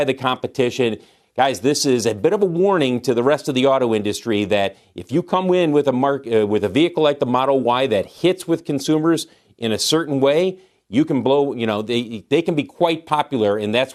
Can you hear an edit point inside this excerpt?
no; 0 cuts

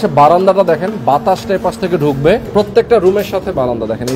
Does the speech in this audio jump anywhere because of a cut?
yes; 1 cut; at 2.5 s

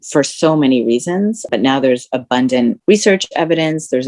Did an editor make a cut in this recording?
yes; 1 cut; at 2.8 s

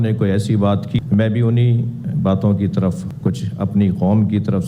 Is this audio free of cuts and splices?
no; 1 cut; at 1.0 s

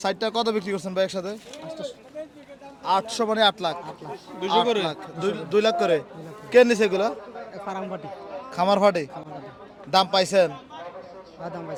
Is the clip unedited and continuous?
yes; 0 cuts

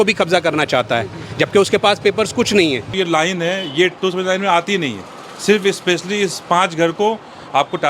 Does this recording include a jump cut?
yes; 1 cut; at 2.9 s

